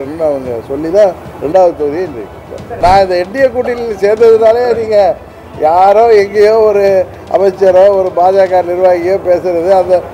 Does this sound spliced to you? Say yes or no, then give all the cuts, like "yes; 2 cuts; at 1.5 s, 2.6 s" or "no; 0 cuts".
yes; 1 cut; at 2.8 s